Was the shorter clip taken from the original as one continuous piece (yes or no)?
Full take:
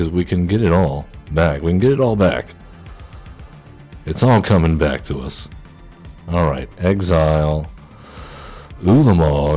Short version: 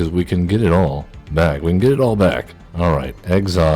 no